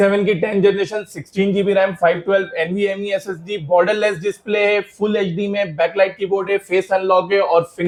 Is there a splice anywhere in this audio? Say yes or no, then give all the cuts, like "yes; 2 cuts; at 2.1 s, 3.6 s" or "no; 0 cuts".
no; 0 cuts